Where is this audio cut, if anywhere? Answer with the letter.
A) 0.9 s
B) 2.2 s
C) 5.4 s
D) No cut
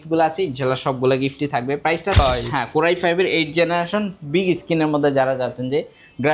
B